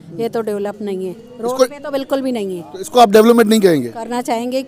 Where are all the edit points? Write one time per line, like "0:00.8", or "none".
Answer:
none